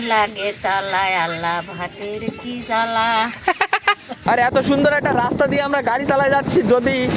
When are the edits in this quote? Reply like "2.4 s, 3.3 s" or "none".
4.2 s

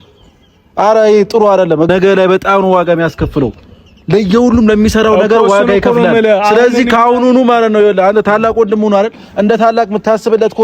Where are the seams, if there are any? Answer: 1.9 s

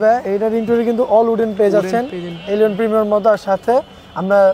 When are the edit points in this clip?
none

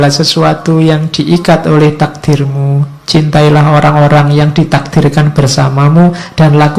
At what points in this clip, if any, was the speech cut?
none

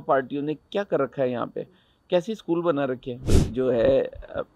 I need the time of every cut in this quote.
3.3 s

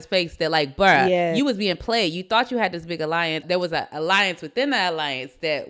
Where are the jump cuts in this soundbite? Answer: 3.4 s

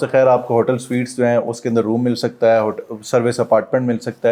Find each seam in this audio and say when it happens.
none

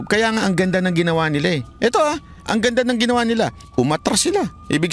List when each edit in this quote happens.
3.6 s

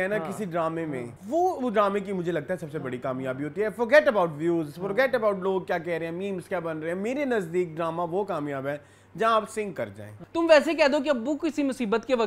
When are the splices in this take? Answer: 1.1 s, 10.2 s

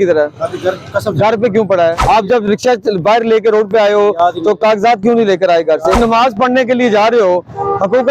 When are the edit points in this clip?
2.0 s, 6.0 s

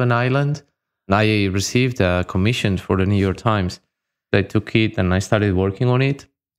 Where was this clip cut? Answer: 1.1 s, 4.3 s

